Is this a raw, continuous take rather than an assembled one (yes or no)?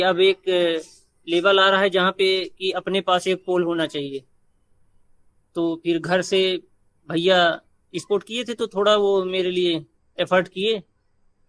yes